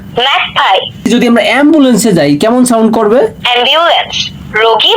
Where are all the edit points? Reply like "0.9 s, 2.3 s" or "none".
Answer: 1.1 s